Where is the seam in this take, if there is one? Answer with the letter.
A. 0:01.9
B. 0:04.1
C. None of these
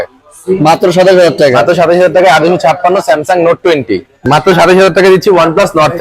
B